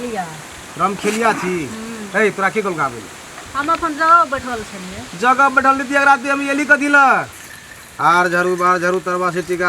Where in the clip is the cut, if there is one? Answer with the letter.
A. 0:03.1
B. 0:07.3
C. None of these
B